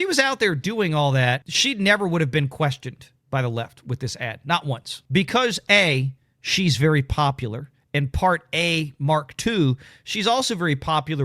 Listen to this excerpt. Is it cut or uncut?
cut